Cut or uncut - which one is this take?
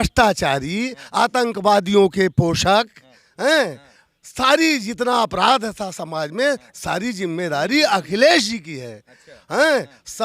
uncut